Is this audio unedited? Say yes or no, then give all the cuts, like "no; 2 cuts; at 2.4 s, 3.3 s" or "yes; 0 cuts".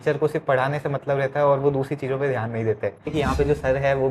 no; 1 cut; at 3.1 s